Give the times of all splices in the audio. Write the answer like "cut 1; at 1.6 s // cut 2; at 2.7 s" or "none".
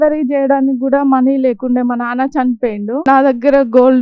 cut 1; at 3.1 s